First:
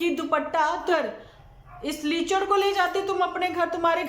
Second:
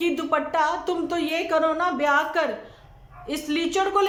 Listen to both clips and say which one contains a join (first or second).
first